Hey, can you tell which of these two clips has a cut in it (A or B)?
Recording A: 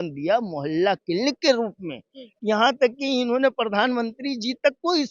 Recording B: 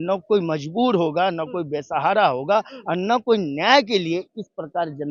A